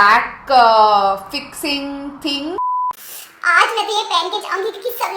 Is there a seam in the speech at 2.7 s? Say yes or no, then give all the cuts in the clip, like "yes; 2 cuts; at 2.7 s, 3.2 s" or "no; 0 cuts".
yes; 1 cut; at 2.7 s